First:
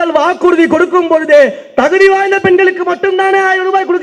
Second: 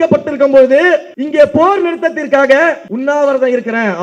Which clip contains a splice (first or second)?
second